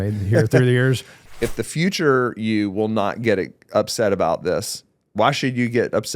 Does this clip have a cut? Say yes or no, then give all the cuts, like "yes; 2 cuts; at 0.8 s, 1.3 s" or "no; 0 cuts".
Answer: yes; 1 cut; at 1.1 s